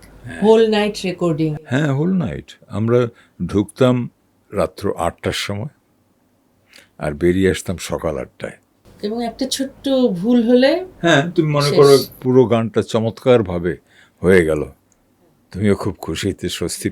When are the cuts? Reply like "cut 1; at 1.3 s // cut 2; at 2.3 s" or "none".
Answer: none